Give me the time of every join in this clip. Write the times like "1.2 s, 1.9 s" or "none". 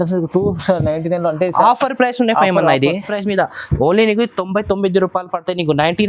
3.1 s